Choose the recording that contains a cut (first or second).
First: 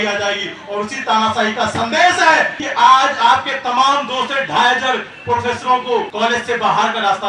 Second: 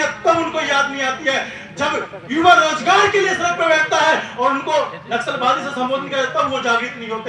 first